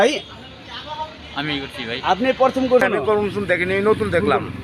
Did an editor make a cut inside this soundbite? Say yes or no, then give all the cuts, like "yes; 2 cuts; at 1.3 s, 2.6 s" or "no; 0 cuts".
yes; 1 cut; at 2.8 s